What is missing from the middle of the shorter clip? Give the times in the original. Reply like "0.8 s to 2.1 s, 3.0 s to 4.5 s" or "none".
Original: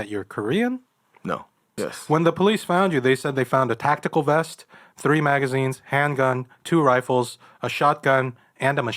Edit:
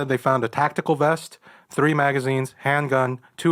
none